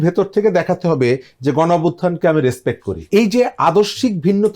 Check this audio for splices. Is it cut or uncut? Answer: cut